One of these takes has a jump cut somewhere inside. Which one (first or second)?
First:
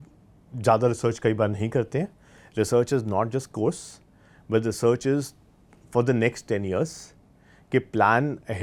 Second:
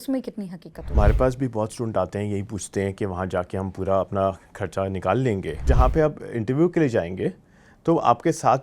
second